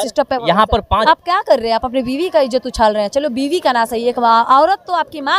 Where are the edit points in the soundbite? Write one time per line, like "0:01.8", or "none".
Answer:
0:01.0